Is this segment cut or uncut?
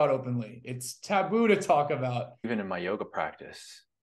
cut